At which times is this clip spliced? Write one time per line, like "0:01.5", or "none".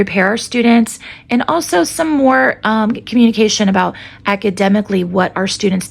none

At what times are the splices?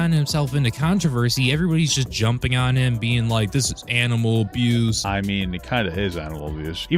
0:05.0

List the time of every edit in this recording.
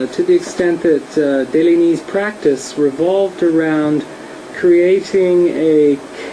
0:02.3

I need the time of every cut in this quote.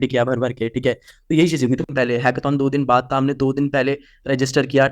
0:01.9

